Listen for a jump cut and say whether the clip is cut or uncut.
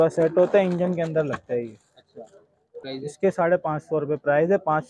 cut